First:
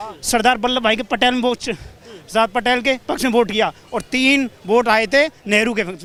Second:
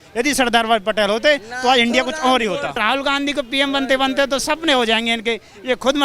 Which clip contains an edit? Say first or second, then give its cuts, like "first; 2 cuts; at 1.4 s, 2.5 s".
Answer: second; 1 cut; at 2.8 s